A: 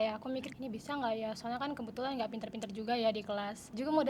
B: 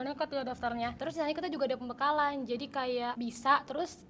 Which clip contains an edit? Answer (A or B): B